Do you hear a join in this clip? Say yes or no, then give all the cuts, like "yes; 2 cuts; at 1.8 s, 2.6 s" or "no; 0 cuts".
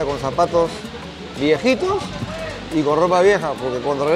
no; 0 cuts